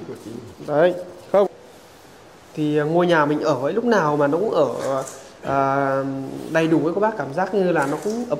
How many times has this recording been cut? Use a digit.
1